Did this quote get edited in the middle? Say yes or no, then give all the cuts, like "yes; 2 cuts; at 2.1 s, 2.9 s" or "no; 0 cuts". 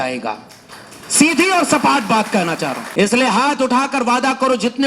yes; 1 cut; at 2.8 s